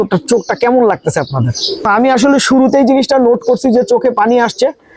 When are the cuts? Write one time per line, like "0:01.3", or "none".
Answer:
0:01.9